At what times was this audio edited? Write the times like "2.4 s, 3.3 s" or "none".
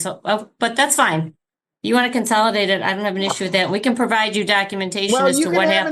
none

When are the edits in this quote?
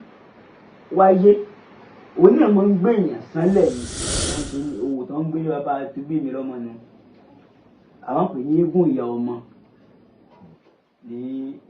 4.3 s

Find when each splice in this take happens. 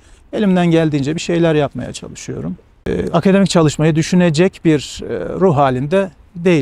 2.9 s

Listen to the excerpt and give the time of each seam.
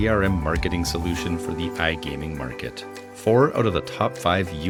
none

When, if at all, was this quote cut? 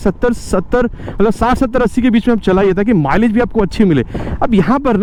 none

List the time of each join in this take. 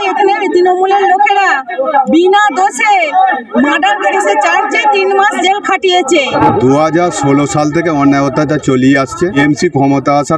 6.3 s, 9.4 s

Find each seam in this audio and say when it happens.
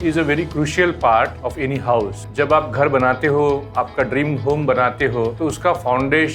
1.9 s, 5.3 s

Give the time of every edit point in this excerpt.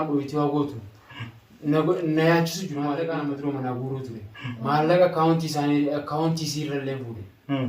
3.0 s

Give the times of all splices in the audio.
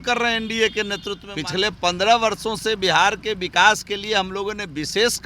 1.2 s

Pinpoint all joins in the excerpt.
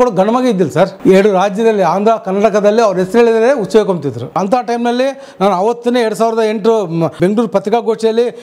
1.0 s, 4.4 s, 7.1 s

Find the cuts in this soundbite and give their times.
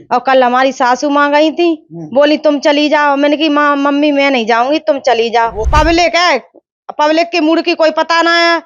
5.7 s

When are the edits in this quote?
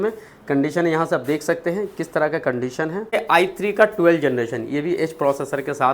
3.1 s

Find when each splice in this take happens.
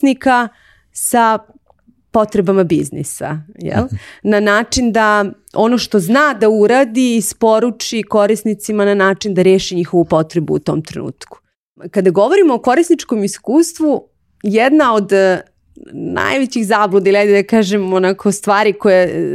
11.9 s

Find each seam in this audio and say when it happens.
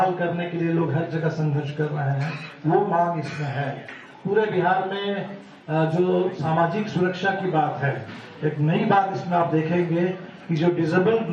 3.2 s

